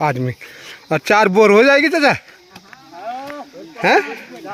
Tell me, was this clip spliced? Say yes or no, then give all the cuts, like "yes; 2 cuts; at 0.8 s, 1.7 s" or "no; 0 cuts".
no; 0 cuts